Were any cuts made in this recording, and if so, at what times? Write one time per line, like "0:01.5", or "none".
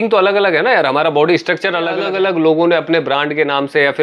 0:02.0